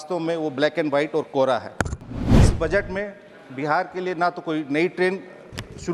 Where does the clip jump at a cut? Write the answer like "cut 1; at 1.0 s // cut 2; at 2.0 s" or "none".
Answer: cut 1; at 2.5 s

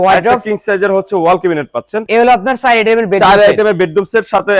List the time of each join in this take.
cut 1; at 2.0 s

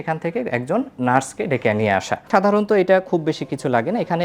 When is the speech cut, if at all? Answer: cut 1; at 2.2 s

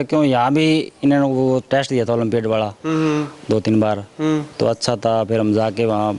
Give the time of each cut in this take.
none

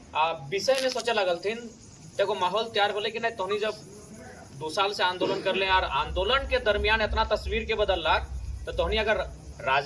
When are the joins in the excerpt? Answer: none

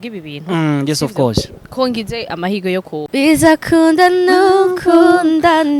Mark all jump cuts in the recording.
cut 1; at 2.9 s

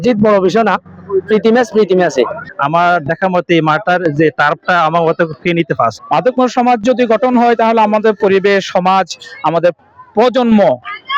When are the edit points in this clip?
cut 1; at 2.4 s // cut 2; at 6.0 s

